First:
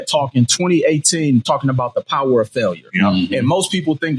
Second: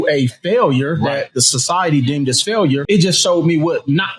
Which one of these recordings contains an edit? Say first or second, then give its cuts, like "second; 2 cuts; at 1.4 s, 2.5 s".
second; 1 cut; at 2.8 s